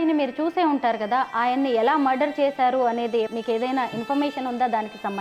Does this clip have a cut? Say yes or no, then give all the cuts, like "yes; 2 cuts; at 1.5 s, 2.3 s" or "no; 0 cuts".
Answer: yes; 1 cut; at 3.3 s